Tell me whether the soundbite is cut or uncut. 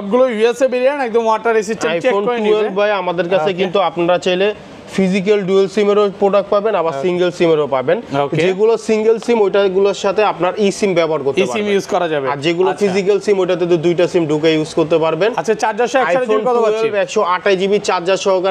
uncut